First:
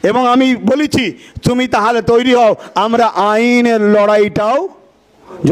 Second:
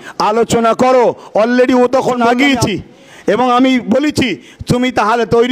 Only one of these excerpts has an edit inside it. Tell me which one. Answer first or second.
second